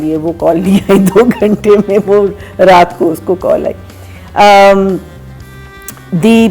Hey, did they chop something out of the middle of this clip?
no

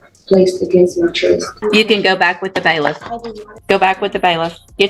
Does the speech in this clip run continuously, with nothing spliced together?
no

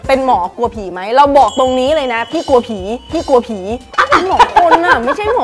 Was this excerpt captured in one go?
yes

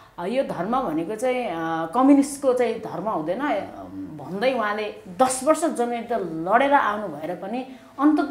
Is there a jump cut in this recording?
no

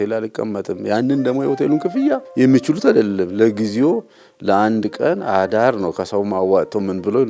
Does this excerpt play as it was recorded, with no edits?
no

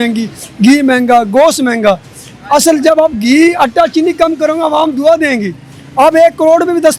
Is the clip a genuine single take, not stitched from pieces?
yes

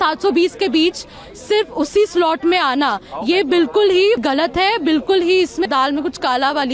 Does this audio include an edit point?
yes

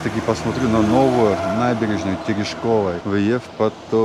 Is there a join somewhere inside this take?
yes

